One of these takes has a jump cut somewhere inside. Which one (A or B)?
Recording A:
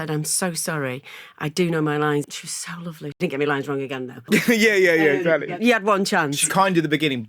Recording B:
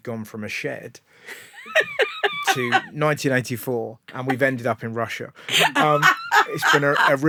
A